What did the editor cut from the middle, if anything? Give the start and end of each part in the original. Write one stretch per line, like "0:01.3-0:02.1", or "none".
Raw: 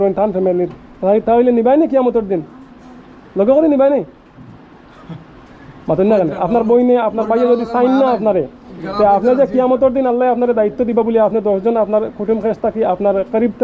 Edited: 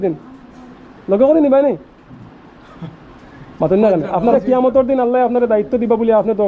0:06.6-0:09.4

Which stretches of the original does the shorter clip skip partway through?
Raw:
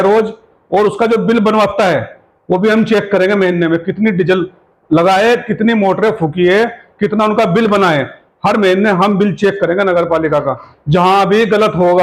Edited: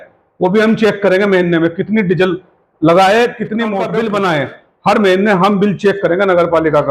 0:06.0-0:07.5

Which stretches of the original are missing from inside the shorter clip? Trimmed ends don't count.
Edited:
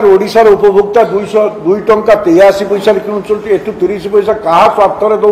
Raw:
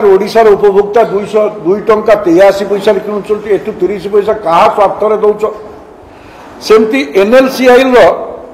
none

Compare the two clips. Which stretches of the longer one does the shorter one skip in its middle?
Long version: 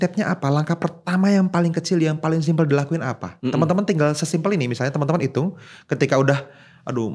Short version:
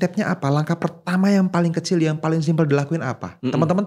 none

